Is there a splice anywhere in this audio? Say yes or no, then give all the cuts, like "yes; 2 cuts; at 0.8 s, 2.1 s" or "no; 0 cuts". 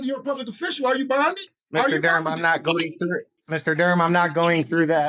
yes; 2 cuts; at 1.5 s, 3.3 s